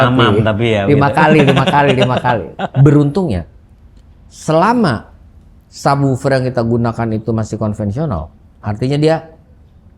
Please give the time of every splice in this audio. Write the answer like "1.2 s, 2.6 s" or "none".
2.6 s

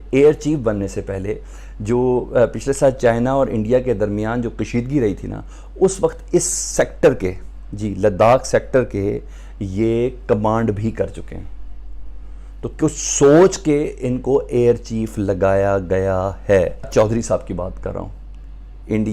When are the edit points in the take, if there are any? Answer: 16.9 s

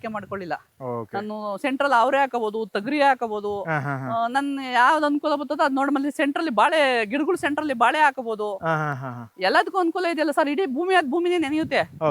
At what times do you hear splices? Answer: none

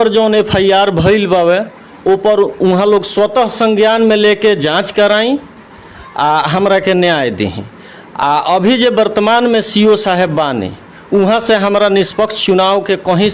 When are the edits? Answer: none

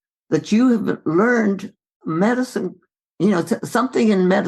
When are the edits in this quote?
1.7 s

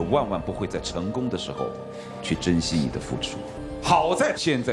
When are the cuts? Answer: 3.5 s

